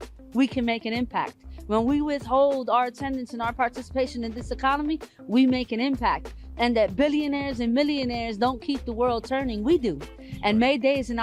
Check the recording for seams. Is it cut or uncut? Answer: uncut